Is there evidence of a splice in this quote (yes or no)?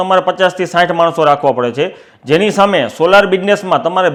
no